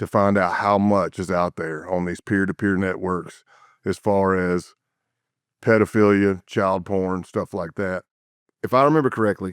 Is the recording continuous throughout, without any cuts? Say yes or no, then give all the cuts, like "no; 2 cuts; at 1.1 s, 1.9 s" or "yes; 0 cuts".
no; 1 cut; at 8.3 s